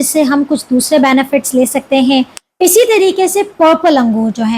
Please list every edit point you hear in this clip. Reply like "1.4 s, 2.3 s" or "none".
2.4 s